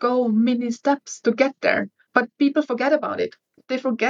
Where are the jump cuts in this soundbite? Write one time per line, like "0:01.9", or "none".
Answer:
none